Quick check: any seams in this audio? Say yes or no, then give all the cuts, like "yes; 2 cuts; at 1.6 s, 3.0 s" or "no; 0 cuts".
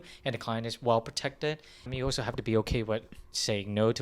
yes; 1 cut; at 1.9 s